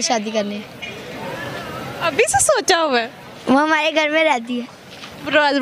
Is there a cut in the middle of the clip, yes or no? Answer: no